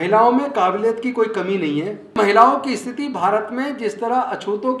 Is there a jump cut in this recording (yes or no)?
yes